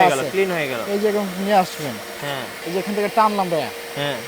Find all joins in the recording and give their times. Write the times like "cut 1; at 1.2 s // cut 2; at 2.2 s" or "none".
cut 1; at 2.6 s

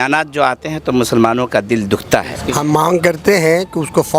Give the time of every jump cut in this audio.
cut 1; at 2.4 s

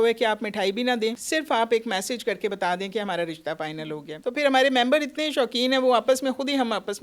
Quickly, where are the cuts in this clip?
cut 1; at 1.2 s // cut 2; at 4.1 s

